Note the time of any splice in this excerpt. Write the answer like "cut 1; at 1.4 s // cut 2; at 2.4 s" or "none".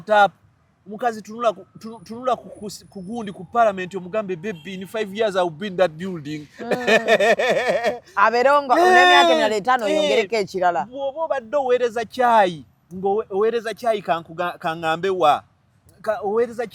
none